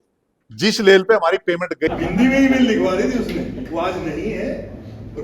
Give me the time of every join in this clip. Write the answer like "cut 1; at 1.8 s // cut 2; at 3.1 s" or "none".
cut 1; at 1.9 s